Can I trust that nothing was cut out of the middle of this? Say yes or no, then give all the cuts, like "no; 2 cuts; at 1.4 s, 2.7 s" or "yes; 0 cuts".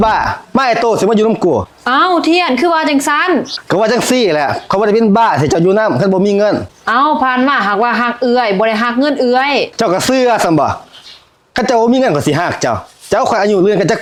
yes; 0 cuts